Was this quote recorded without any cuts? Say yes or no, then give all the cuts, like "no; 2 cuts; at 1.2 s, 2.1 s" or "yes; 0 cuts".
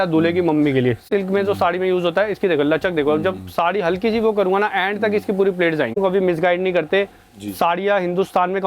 no; 2 cuts; at 1.1 s, 6.0 s